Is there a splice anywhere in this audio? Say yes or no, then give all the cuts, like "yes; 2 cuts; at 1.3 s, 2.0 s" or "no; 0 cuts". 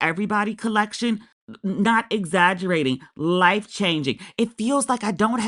no; 0 cuts